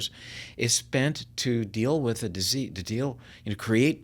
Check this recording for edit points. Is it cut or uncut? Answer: uncut